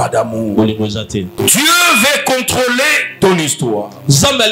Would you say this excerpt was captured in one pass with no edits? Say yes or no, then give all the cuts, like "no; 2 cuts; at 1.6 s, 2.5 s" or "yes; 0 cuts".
no; 1 cut; at 1.3 s